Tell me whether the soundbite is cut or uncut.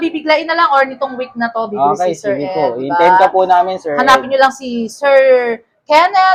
uncut